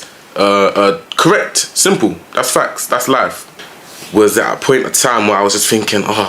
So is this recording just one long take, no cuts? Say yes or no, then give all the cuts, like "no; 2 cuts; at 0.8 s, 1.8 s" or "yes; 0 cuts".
no; 1 cut; at 3.5 s